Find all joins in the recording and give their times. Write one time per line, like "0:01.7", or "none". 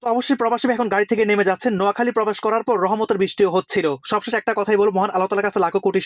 none